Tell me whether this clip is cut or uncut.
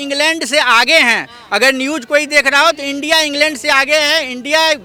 uncut